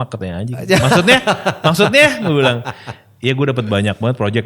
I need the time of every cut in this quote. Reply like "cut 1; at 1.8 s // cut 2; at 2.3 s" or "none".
none